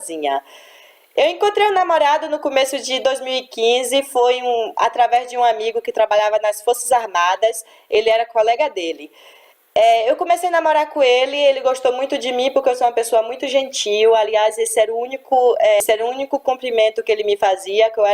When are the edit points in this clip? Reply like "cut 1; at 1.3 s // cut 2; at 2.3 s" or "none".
cut 1; at 16.0 s